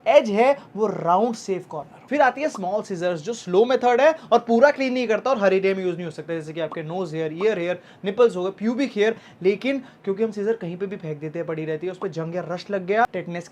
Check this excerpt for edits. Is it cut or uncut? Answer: uncut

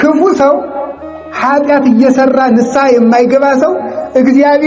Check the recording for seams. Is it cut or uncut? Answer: uncut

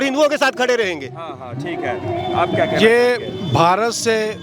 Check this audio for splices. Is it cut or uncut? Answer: uncut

